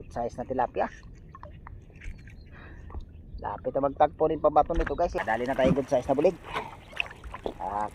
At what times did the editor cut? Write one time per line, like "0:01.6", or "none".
0:05.1